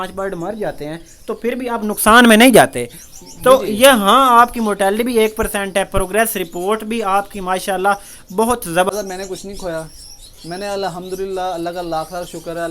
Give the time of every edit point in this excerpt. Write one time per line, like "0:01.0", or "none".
0:08.9